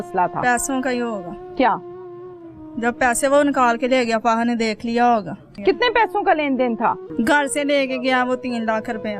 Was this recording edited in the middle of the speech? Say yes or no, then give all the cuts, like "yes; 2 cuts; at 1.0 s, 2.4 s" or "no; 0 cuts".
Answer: yes; 2 cuts; at 5.5 s, 7.0 s